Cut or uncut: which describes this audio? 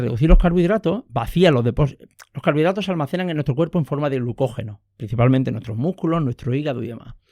uncut